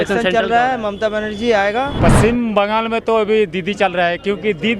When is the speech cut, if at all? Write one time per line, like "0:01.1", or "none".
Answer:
0:01.9